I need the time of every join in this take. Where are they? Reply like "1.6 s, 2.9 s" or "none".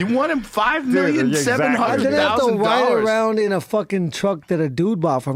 none